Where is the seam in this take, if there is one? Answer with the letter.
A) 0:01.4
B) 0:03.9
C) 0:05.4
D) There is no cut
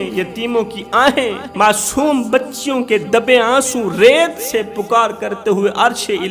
A